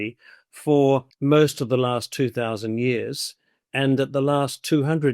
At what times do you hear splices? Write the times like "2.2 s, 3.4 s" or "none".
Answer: 1.1 s